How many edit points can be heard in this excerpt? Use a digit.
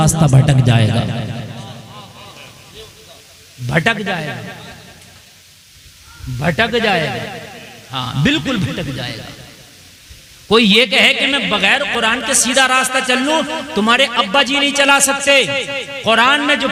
0